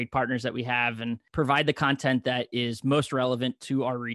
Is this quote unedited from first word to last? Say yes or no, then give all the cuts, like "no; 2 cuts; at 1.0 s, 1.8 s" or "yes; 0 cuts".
no; 1 cut; at 1.3 s